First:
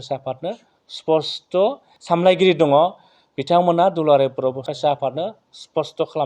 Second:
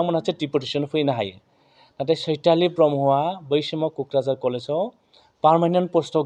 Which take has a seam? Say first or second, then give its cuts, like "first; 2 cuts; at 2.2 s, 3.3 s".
first; 2 cuts; at 1.9 s, 4.7 s